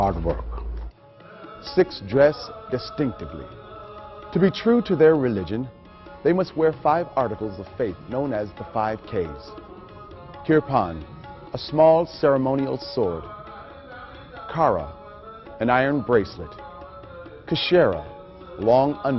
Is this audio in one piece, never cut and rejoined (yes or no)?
yes